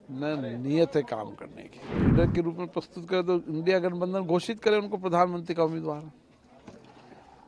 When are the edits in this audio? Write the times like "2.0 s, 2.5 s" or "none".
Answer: 1.8 s